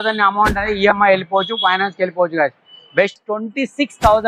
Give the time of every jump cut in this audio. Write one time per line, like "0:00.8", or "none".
0:03.1